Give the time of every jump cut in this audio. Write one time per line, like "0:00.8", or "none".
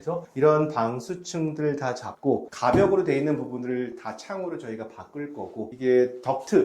0:02.5